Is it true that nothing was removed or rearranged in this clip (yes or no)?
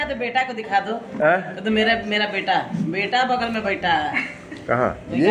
yes